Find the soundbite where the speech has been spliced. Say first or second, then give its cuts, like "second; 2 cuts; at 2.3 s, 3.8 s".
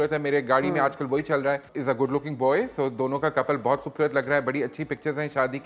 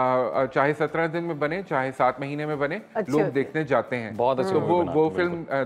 first; 1 cut; at 1.7 s